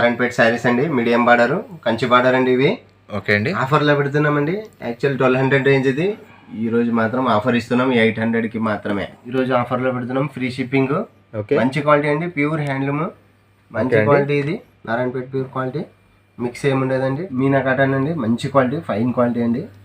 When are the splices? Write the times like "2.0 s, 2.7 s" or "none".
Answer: 9.2 s, 17.3 s